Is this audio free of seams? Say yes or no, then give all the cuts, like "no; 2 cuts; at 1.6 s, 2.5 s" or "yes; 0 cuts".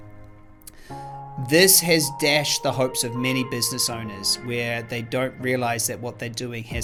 yes; 0 cuts